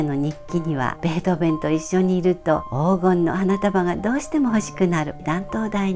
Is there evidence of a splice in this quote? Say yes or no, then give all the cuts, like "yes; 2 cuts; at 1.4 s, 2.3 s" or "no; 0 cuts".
yes; 2 cuts; at 0.9 s, 5.2 s